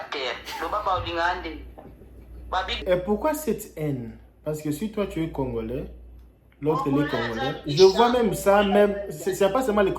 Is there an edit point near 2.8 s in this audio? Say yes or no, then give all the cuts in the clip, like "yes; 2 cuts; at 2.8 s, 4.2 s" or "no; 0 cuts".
yes; 1 cut; at 2.8 s